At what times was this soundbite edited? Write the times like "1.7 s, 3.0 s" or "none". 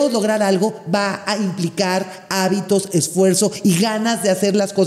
none